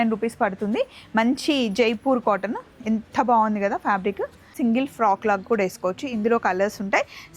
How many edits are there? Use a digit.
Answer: 1